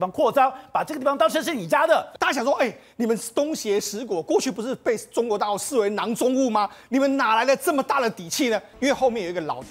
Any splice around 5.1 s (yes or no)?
no